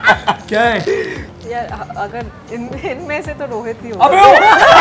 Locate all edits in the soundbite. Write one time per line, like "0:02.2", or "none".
0:01.3